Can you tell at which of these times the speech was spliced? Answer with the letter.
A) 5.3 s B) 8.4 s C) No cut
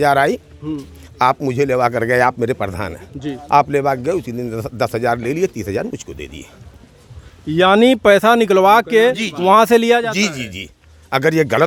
C